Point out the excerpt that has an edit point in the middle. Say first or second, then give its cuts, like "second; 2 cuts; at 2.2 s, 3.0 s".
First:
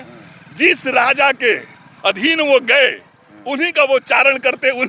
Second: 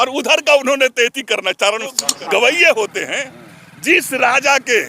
second; 1 cut; at 2.1 s